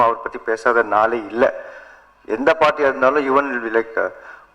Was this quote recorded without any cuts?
yes; 0 cuts

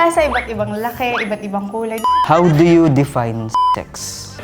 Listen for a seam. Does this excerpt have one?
yes; 1 cut; at 2.1 s

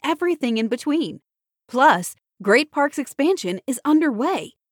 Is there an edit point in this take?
no; 0 cuts

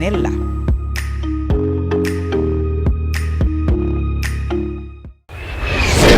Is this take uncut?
no; 1 cut; at 5.3 s

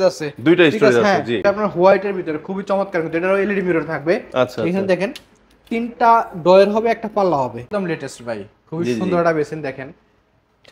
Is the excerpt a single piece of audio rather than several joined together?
no; 2 cuts; at 1.4 s, 7.7 s

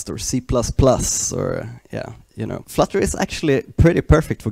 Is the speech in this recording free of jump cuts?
no; 1 cut; at 2.6 s

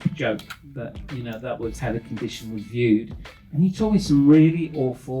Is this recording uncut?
no; 1 cut; at 1.8 s

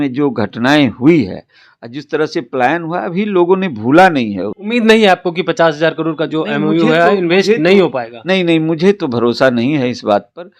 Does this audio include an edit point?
yes; 1 cut; at 4.5 s

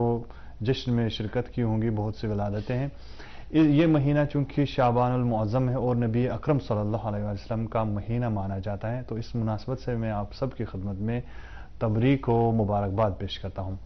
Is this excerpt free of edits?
yes; 0 cuts

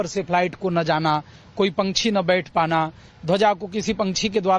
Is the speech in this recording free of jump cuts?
yes; 0 cuts

